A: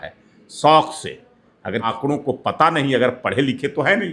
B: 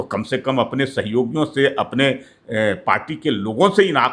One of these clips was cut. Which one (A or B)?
A